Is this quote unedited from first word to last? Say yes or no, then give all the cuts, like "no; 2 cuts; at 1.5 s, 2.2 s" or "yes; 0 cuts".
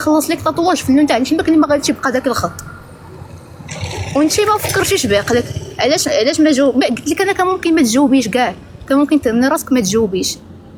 yes; 0 cuts